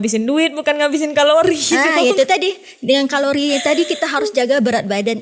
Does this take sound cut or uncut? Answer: uncut